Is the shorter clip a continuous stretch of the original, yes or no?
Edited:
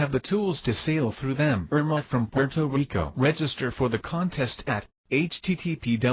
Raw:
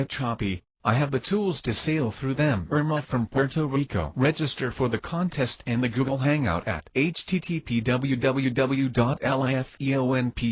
no